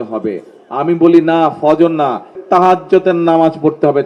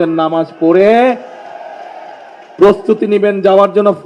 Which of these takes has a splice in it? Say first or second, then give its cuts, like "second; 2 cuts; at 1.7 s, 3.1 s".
first; 1 cut; at 2.4 s